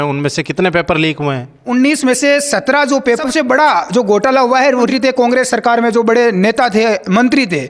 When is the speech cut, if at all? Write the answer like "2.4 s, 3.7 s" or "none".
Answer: 1.6 s, 3.2 s, 4.9 s